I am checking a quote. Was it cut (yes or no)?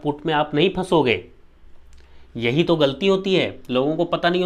no